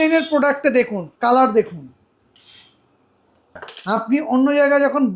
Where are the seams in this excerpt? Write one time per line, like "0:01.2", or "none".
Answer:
0:01.0
0:03.4

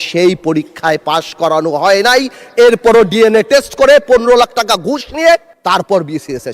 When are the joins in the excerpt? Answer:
0:05.5

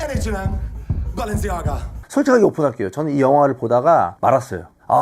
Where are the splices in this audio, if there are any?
0:01.9

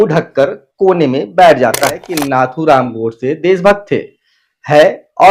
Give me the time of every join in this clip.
0:02.1

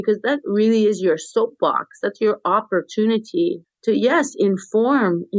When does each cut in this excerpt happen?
none

